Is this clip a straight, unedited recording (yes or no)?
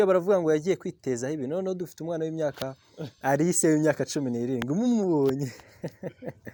yes